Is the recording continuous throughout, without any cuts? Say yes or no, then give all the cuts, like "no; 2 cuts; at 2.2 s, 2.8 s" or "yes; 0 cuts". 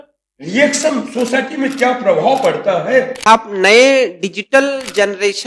no; 1 cut; at 3.2 s